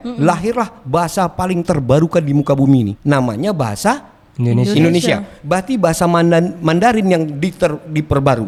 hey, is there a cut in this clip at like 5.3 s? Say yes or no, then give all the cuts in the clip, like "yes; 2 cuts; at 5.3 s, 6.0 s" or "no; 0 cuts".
no; 0 cuts